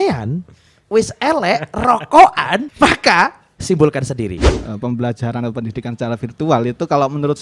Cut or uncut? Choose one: cut